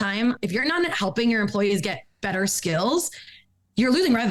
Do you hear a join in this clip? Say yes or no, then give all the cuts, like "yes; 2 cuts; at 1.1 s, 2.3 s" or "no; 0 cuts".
no; 0 cuts